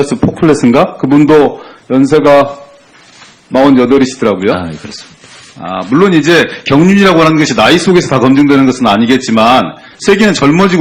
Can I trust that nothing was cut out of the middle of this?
no; 1 cut; at 2.3 s

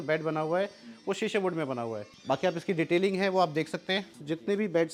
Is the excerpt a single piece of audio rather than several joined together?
yes; 0 cuts

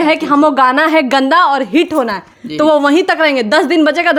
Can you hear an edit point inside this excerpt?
no; 0 cuts

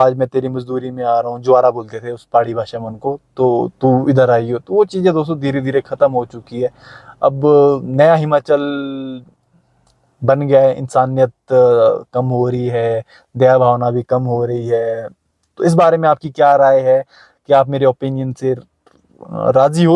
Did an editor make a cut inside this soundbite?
no; 0 cuts

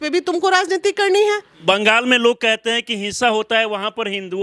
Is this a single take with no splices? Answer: no; 1 cut; at 1.5 s

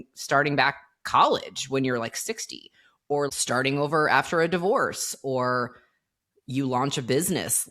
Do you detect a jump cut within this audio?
yes; 1 cut; at 3.3 s

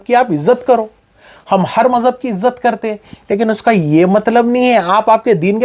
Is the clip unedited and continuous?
yes; 0 cuts

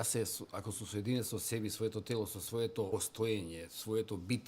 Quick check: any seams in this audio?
yes; 1 cut; at 2.9 s

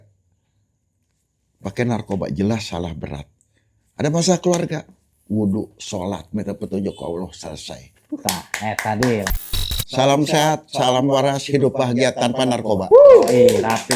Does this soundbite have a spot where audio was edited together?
yes; 1 cut; at 9.4 s

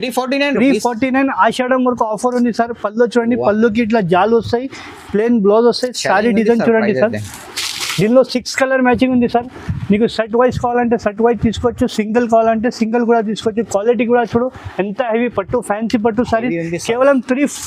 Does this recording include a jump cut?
no; 0 cuts

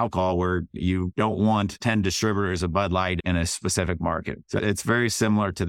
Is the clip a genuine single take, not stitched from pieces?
no; 4 cuts; at 0.7 s, 1.8 s, 3.2 s, 4.4 s

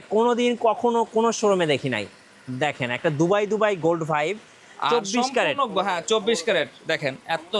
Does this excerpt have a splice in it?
no; 0 cuts

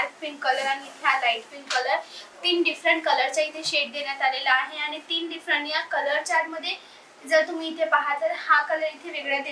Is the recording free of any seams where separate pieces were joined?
yes; 0 cuts

